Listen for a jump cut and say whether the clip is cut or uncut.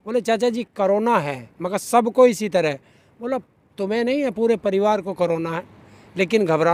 uncut